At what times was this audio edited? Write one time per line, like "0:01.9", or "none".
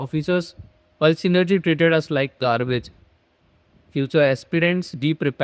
none